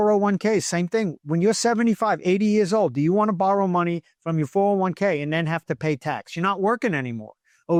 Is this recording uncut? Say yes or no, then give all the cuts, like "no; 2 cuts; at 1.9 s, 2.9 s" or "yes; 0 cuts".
yes; 0 cuts